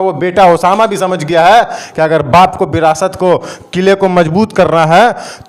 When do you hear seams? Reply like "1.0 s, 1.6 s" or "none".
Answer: none